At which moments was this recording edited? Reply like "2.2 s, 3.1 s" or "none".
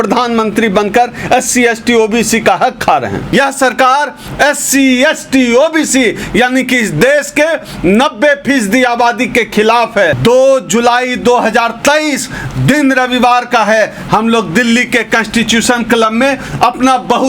3.3 s, 10.2 s